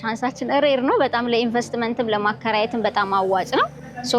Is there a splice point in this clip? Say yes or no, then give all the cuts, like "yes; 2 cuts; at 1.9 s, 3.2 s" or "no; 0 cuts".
no; 0 cuts